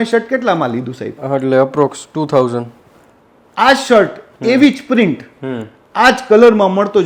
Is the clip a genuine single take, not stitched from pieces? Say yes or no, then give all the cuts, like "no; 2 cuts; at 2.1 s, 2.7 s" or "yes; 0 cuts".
yes; 0 cuts